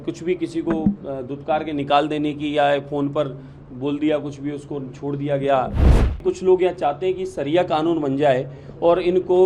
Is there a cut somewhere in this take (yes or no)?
yes